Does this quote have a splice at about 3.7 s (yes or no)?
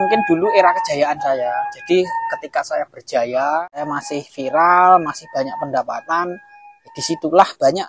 yes